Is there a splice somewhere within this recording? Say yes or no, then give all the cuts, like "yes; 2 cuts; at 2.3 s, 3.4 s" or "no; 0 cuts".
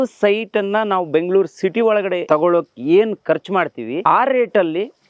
yes; 2 cuts; at 2.2 s, 3.9 s